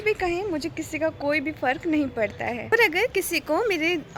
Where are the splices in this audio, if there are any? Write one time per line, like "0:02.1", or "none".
none